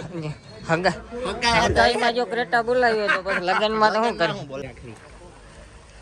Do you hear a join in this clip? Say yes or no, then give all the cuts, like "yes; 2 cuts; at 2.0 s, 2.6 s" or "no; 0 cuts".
yes; 1 cut; at 4.7 s